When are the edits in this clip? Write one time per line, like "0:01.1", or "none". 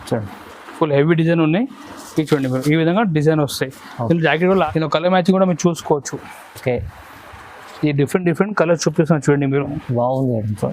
0:04.6

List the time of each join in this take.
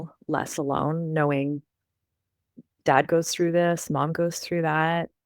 none

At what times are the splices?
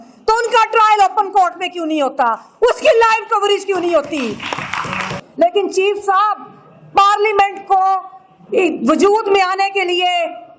0:05.2

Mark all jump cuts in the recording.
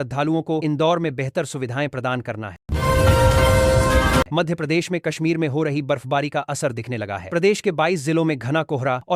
0:02.5
0:04.3

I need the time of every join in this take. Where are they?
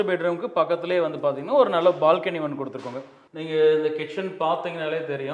0:03.2

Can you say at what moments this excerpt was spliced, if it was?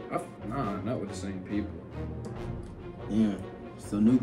none

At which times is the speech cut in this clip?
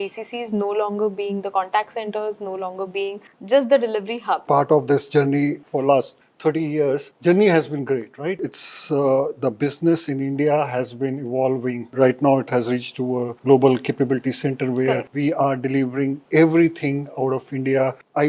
0:04.4

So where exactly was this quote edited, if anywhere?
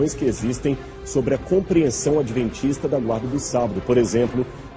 none

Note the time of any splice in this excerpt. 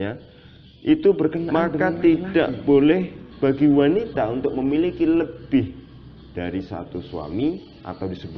0:01.5

